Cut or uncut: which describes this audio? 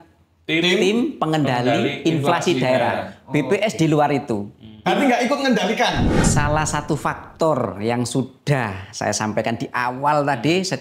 cut